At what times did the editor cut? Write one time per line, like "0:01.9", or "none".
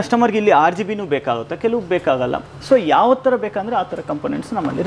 none